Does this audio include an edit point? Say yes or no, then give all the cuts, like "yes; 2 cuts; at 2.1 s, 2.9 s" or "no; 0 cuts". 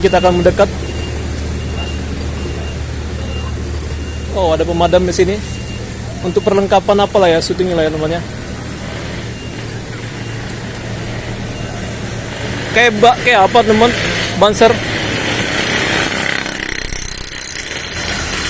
no; 0 cuts